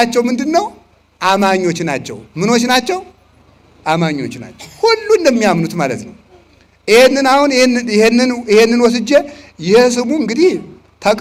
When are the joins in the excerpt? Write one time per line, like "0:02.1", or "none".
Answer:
none